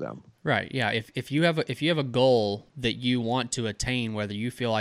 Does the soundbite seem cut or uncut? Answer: cut